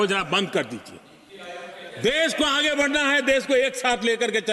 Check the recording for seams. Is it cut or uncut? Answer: uncut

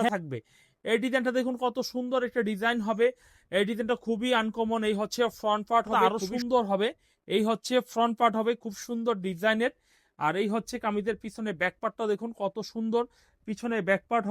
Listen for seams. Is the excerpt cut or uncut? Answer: cut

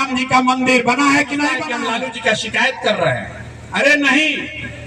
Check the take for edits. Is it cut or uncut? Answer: cut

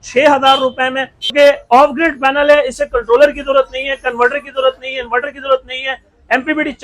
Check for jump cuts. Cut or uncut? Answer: cut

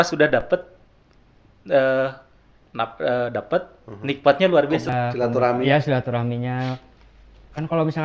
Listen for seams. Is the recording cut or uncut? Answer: cut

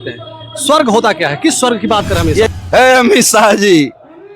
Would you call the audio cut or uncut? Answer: cut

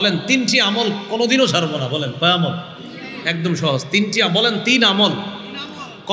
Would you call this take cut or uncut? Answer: uncut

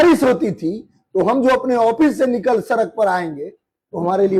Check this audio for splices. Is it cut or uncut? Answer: uncut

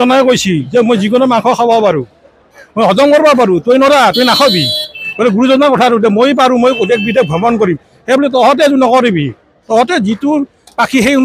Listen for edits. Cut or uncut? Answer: uncut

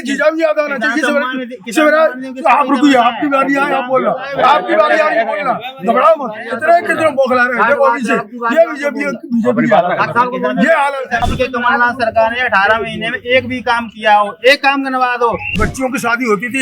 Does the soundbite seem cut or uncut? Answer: cut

